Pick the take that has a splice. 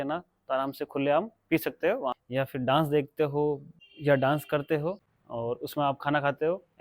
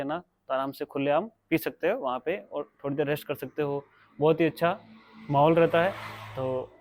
first; 2 cuts; at 2.2 s, 5.0 s

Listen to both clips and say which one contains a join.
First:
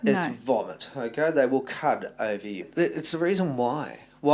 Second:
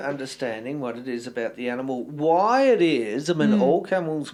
first; 1 cut; at 2.6 s

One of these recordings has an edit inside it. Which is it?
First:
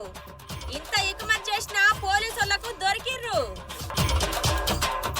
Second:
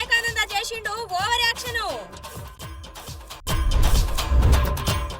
first; 1 cut; at 3.9 s

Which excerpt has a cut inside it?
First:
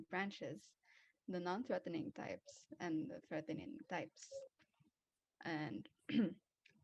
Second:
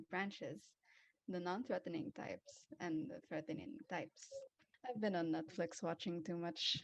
second; 1 cut; at 4.7 s

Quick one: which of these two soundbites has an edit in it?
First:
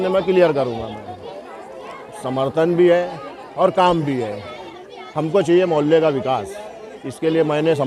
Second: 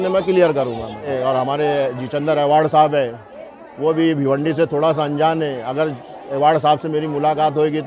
second; 1 cut; at 1.1 s

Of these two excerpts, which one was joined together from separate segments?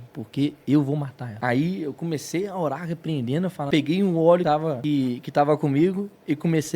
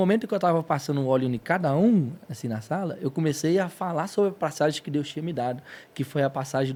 first; 3 cuts; at 1.2 s, 3.6 s, 4.5 s

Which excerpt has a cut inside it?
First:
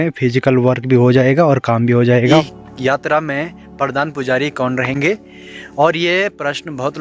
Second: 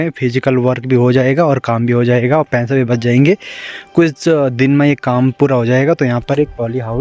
first; 1 cut; at 2.5 s

